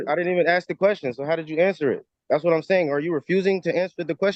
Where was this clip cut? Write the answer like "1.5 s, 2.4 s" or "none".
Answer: none